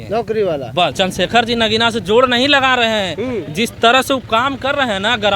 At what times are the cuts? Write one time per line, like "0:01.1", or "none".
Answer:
0:00.9